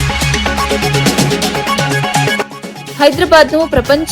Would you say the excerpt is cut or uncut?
cut